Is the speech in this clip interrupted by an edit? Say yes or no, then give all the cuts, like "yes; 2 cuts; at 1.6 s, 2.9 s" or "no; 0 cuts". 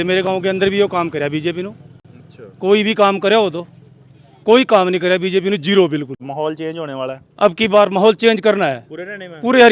no; 0 cuts